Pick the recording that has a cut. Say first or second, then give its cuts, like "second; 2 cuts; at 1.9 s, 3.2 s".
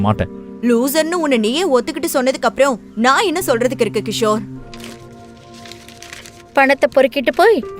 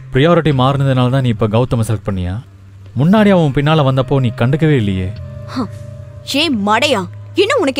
first; 1 cut; at 4.7 s